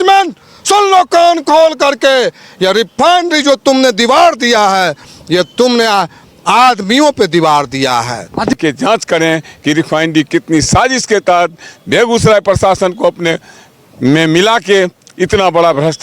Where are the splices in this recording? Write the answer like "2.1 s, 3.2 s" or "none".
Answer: 8.5 s

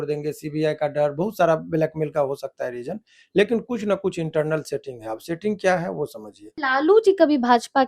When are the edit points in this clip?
6.6 s

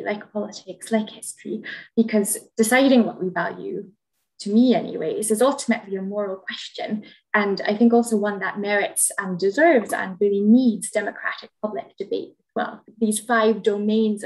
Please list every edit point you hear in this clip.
12.9 s

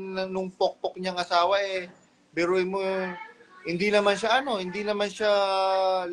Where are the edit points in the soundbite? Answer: none

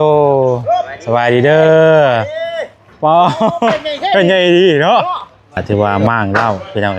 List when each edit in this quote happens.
5.6 s

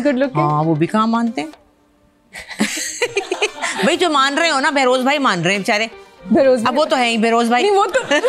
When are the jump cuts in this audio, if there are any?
none

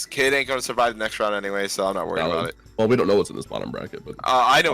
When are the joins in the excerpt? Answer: 2.6 s

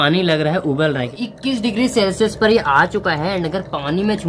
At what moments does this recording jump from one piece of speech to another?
1.1 s

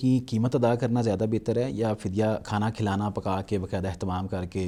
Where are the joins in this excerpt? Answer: none

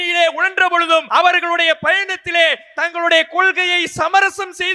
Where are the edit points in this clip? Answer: 1.1 s

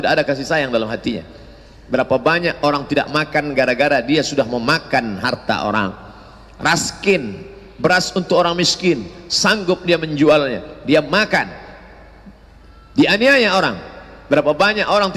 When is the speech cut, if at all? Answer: none

